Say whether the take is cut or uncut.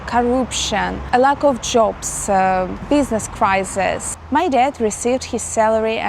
cut